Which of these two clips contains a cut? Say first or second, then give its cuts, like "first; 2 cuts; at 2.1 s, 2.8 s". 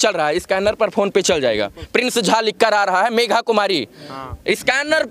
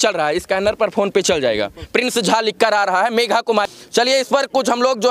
second; 1 cut; at 3.7 s